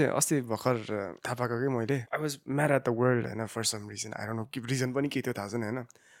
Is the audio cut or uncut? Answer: cut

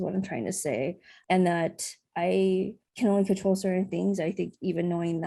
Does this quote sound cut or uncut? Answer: cut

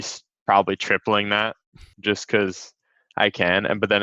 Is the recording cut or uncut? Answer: cut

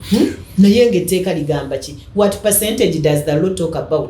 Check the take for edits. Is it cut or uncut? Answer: uncut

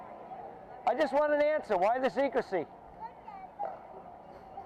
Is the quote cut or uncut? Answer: uncut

